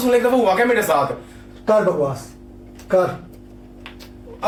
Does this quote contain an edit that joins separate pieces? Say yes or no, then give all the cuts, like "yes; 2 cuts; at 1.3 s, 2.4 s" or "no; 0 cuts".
no; 0 cuts